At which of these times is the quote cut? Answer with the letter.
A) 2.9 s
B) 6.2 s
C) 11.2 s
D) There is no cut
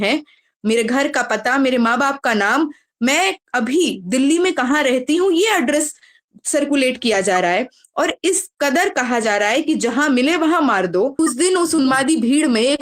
C